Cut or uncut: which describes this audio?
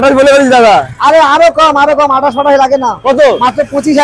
uncut